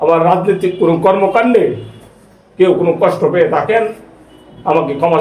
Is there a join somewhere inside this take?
no; 0 cuts

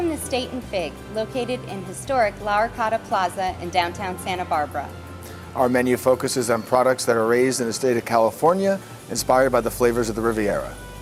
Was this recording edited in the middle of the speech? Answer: no; 0 cuts

